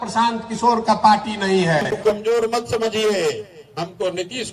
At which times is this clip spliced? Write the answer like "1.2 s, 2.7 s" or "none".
1.9 s

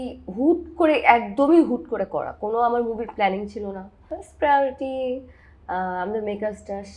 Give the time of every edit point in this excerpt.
4.0 s

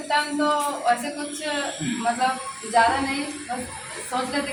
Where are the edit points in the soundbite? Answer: none

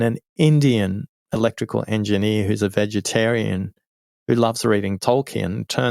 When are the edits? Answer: 4.9 s

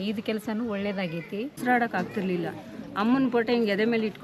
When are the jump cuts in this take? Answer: 1.6 s

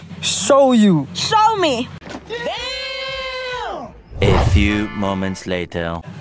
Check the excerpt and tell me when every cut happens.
4.2 s

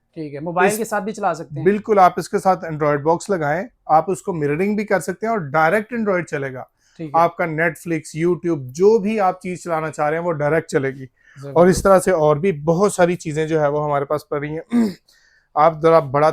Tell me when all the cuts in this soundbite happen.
none

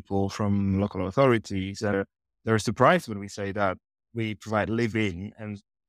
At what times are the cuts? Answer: none

